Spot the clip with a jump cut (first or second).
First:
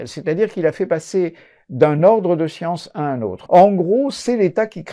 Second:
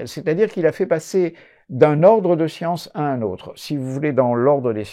first